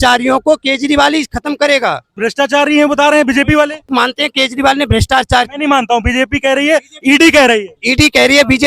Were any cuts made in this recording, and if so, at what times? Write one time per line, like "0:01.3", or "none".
0:02.1
0:03.9
0:07.8